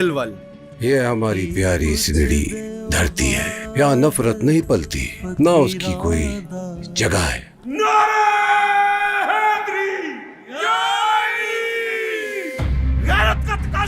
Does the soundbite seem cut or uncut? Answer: uncut